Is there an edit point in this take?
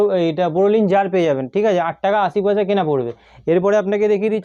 no; 0 cuts

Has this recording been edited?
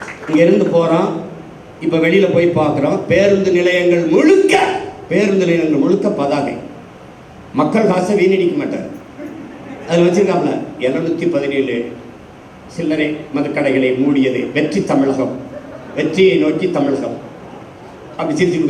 no; 0 cuts

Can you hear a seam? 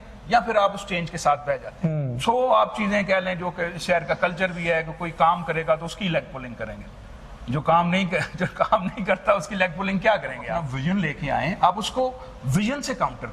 yes; 2 cuts; at 1.7 s, 10.7 s

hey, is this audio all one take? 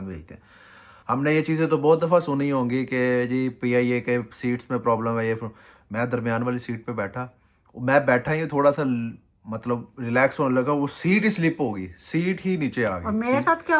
yes; 0 cuts

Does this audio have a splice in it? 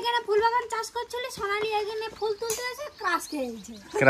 no; 0 cuts

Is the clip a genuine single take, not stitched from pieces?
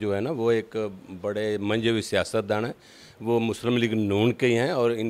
yes; 0 cuts

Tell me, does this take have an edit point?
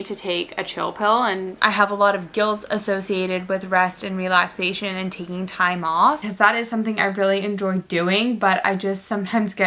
yes; 2 cuts; at 1.5 s, 6.2 s

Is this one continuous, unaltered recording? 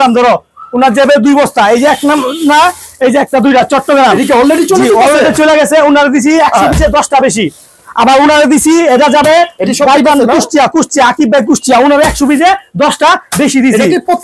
yes; 0 cuts

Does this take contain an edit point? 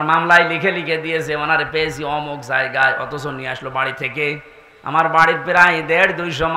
no; 0 cuts

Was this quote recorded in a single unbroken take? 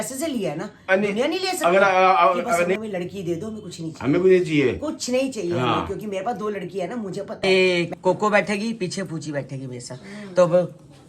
no; 2 cuts; at 2.8 s, 7.4 s

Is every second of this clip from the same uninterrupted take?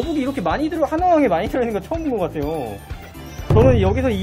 no; 1 cut; at 3.2 s

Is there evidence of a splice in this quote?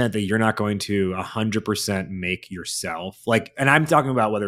no; 0 cuts

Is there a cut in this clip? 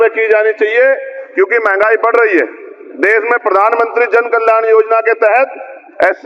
no; 0 cuts

